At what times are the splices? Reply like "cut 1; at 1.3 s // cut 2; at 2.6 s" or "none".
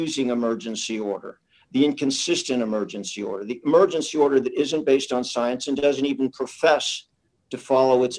none